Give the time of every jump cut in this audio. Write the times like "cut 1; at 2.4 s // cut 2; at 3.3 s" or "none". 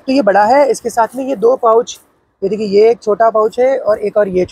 none